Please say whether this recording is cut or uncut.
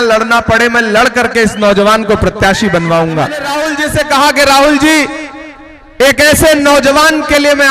cut